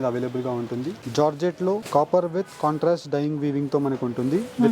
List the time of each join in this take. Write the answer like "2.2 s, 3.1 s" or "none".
1.0 s, 1.8 s

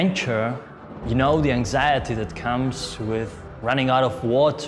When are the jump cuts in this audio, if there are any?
none

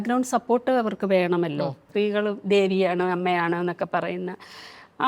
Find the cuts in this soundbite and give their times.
1.8 s

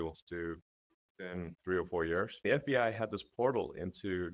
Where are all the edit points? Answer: 1.5 s, 2.3 s

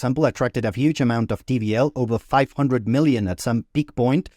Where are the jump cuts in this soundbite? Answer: none

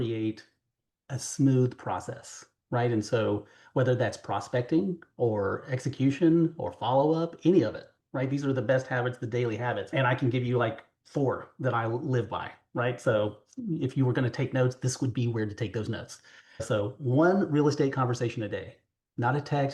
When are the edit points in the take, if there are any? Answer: 9.9 s, 16.6 s

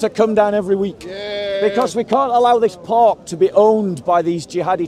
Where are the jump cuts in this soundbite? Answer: none

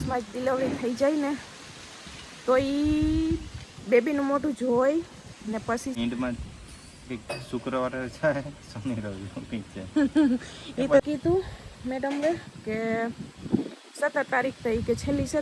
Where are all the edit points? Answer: 6.0 s, 11.0 s

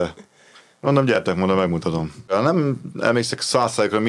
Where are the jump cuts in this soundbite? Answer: 2.3 s

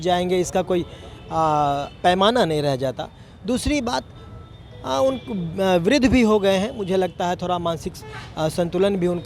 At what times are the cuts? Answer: none

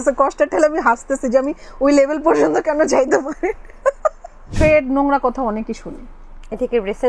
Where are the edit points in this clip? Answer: 4.5 s

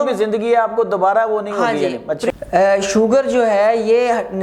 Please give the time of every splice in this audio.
2.3 s

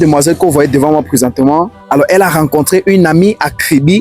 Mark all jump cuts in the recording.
1.8 s

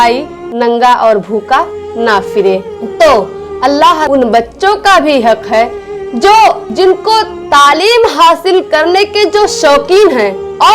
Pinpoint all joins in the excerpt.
4.0 s

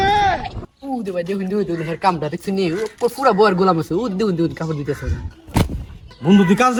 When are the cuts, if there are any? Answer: none

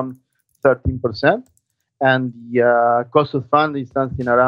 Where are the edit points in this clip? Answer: none

